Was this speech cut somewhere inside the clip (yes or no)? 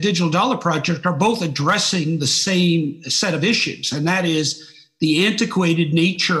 no